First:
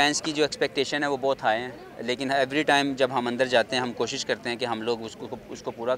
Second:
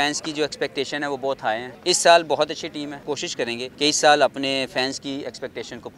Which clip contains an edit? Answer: second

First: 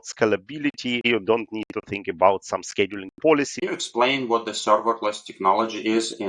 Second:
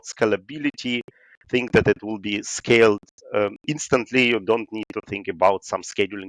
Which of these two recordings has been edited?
first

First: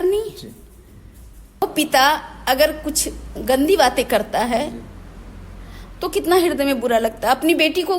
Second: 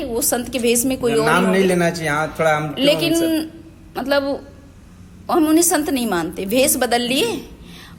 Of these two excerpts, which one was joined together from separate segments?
first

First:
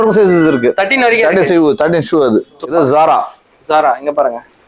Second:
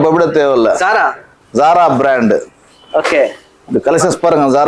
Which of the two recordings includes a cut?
first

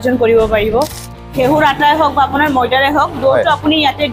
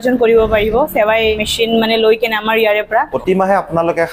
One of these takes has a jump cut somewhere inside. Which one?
first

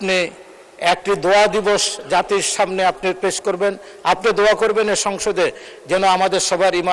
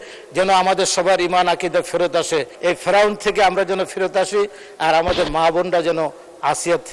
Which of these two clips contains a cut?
second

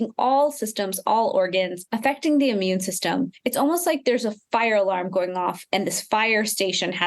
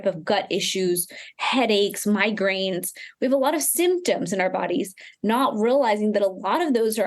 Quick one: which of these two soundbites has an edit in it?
first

